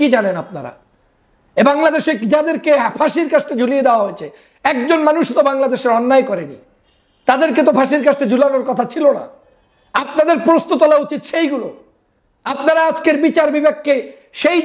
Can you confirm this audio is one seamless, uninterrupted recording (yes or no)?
yes